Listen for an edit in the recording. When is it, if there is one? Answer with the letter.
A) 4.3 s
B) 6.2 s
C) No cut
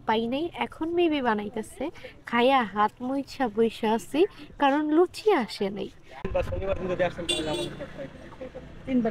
B